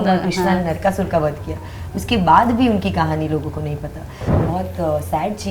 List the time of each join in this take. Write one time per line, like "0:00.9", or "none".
0:04.2

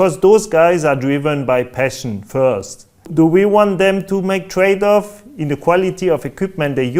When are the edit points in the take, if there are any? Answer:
0:03.1

